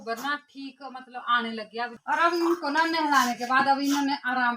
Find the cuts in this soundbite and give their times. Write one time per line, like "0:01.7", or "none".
0:02.0